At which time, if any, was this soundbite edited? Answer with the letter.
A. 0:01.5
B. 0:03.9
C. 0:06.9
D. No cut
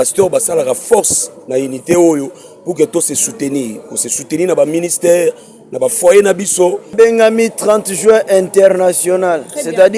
C